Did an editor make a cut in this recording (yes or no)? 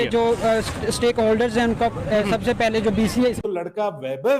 yes